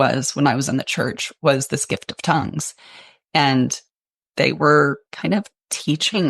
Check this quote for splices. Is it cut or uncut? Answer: cut